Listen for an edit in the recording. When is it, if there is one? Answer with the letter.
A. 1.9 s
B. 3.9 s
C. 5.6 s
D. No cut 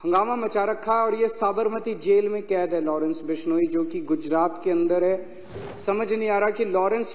C